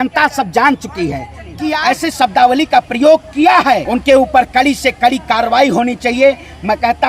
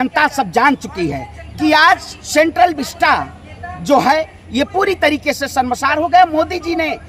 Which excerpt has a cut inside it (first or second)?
first